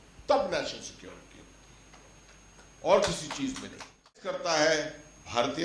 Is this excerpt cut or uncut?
cut